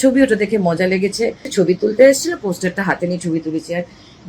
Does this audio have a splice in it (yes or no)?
yes